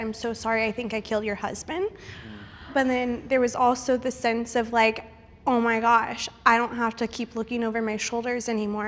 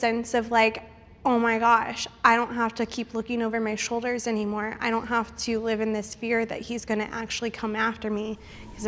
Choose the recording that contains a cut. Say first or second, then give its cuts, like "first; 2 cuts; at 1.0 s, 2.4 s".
first; 1 cut; at 2.7 s